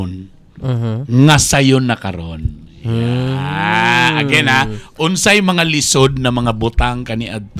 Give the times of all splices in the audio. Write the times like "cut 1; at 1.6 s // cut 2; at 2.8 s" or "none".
none